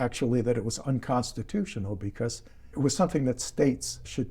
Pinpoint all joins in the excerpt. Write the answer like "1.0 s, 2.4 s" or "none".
2.7 s